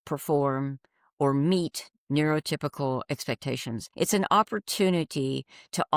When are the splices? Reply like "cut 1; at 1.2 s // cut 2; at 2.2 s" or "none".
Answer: cut 1; at 3.9 s